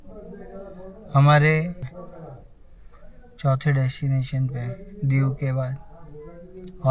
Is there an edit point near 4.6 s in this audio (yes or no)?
no